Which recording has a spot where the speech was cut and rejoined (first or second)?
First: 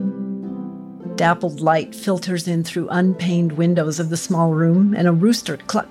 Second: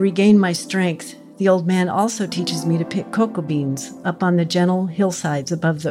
first